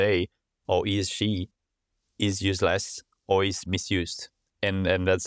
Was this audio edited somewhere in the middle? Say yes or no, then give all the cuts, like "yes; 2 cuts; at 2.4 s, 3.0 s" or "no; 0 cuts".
no; 0 cuts